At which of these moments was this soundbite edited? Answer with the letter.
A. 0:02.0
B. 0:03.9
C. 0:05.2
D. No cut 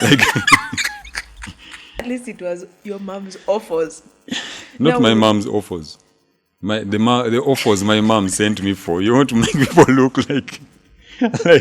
A